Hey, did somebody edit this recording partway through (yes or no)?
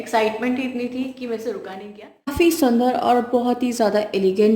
yes